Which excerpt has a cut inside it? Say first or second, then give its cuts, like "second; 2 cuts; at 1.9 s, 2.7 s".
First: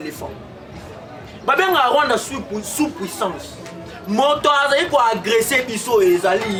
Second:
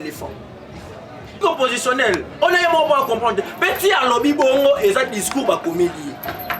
second; 1 cut; at 1.4 s